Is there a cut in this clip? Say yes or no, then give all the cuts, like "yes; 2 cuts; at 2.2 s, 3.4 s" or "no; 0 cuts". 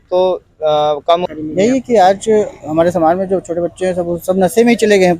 yes; 1 cut; at 1.2 s